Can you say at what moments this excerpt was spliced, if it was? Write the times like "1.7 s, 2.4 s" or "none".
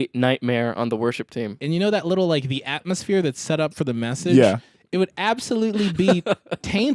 1.5 s